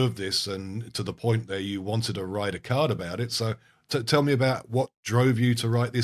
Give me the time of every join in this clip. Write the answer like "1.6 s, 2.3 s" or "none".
none